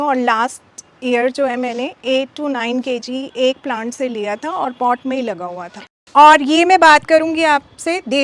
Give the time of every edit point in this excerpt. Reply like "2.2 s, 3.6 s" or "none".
5.8 s